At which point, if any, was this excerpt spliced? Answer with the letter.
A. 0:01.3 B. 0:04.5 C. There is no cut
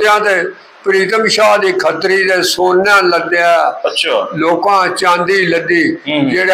C